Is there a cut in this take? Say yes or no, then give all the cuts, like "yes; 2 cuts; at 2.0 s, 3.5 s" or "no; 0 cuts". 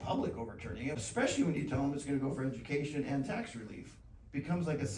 yes; 1 cut; at 1.0 s